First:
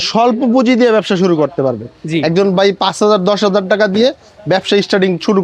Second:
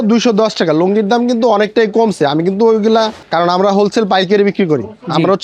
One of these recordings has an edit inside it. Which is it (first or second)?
second